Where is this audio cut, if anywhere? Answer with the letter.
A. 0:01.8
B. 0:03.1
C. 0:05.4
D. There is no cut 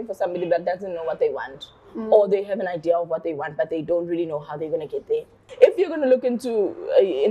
C